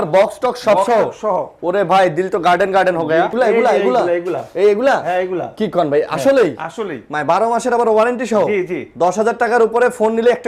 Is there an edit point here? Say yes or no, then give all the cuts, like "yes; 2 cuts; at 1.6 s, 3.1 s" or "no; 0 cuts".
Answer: yes; 1 cut; at 3.3 s